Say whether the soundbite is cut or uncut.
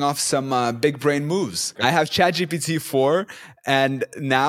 cut